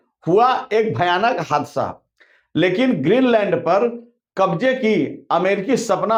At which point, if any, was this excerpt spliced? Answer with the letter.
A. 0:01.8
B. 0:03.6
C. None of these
C